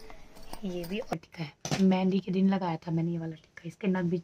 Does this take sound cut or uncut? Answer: cut